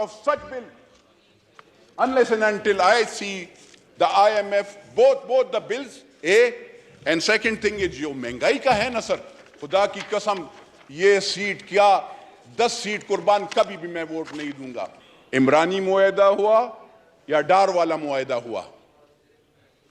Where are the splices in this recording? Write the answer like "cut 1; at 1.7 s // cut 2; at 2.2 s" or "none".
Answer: cut 1; at 14.7 s